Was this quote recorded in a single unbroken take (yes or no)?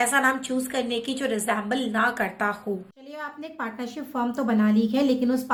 yes